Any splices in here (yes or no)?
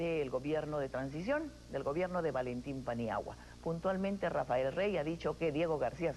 no